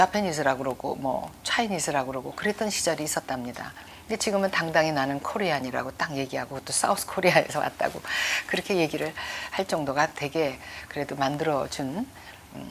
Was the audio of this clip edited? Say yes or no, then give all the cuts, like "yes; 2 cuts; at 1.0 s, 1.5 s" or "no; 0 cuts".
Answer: no; 0 cuts